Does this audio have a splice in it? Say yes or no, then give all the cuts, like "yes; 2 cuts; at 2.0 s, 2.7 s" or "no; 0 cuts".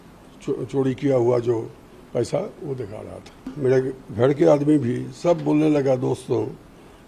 yes; 1 cut; at 3.5 s